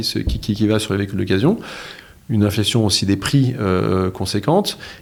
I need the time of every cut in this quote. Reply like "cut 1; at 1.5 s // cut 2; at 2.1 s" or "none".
none